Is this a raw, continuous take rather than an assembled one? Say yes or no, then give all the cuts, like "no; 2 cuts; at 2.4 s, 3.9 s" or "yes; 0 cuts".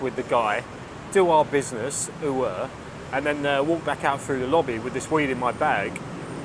yes; 0 cuts